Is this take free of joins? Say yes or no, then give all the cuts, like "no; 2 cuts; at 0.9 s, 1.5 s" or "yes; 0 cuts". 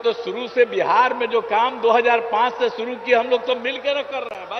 yes; 0 cuts